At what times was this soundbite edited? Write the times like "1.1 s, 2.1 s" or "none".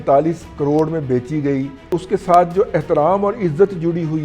1.9 s